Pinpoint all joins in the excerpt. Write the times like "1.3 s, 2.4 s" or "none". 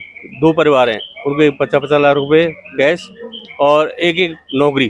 none